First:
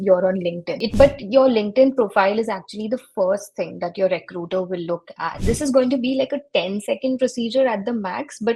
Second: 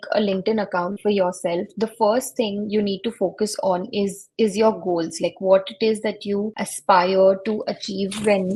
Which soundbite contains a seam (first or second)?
first